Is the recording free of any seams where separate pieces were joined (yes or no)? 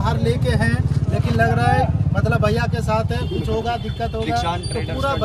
yes